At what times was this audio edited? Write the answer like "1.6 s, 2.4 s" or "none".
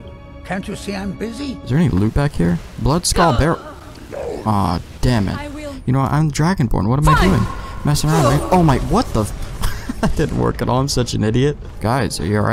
1.7 s, 5.7 s, 11.7 s